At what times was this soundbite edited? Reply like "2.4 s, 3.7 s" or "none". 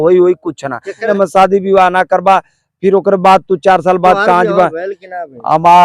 1.1 s